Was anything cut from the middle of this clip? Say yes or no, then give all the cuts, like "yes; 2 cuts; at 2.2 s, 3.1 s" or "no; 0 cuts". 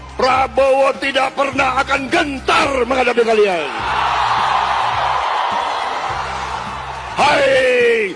no; 0 cuts